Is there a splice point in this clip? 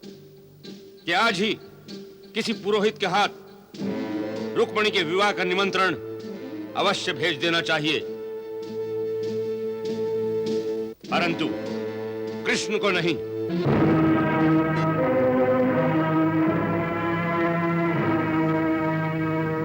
no; 0 cuts

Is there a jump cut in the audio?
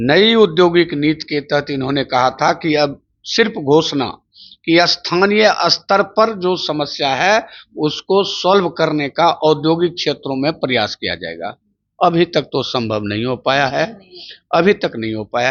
no; 0 cuts

